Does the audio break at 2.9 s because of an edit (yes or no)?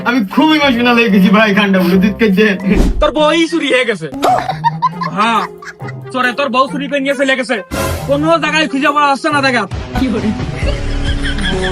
yes